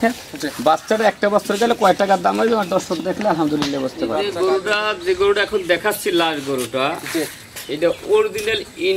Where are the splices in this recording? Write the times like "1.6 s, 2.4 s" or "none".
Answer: 4.2 s